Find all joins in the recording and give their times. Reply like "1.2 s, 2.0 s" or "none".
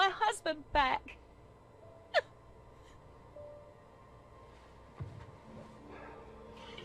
none